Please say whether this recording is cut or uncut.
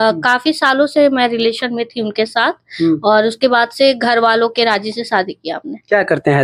uncut